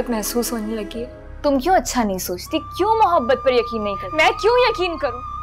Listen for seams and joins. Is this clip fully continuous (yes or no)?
no